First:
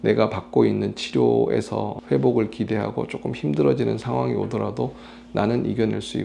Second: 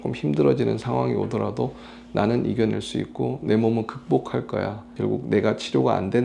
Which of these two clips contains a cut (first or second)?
second